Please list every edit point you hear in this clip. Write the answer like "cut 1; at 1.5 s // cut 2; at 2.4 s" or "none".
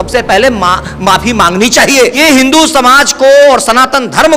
cut 1; at 2.1 s